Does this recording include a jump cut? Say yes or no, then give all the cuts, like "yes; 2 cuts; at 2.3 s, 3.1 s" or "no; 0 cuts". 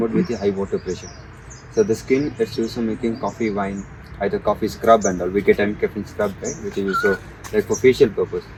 no; 0 cuts